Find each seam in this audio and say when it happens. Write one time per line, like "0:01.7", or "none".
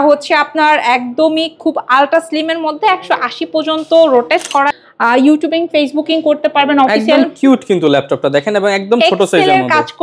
0:04.7